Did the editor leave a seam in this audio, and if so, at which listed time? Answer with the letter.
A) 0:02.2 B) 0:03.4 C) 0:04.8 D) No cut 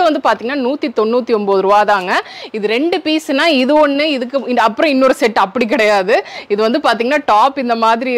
D